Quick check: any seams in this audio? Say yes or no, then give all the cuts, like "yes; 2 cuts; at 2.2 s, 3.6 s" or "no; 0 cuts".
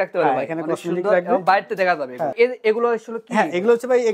yes; 1 cut; at 2.3 s